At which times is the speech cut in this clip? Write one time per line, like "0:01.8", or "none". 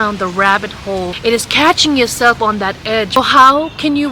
0:01.1
0:03.2